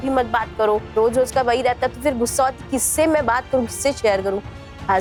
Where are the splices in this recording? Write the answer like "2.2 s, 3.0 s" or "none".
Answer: none